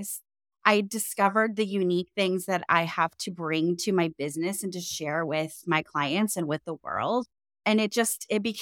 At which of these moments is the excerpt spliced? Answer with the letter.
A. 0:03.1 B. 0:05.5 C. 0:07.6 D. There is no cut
C